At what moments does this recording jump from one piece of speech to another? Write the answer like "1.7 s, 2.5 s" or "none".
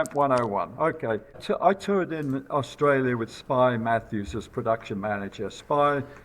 1.4 s